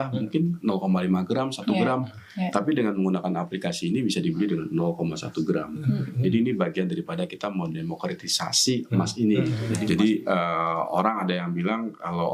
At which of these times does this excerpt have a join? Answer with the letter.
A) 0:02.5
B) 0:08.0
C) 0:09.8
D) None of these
C